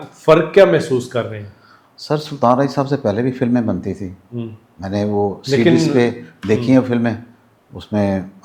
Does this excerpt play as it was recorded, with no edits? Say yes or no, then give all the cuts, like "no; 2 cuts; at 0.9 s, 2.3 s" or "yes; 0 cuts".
yes; 0 cuts